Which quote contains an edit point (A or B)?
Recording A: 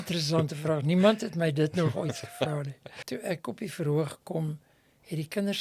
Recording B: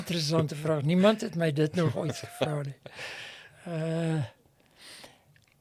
A